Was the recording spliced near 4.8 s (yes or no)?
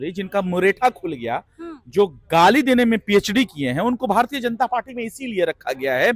no